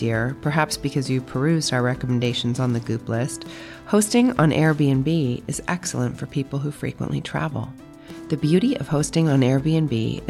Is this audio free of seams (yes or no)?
yes